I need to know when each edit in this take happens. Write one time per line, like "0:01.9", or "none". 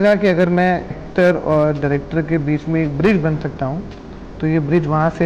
0:01.0